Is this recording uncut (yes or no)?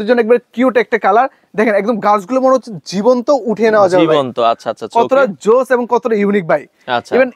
yes